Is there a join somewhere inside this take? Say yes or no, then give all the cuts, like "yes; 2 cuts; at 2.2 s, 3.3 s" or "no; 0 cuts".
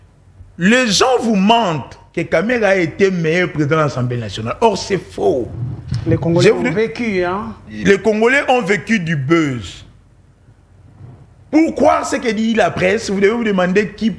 no; 0 cuts